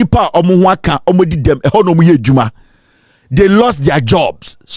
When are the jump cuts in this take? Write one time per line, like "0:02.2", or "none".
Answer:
none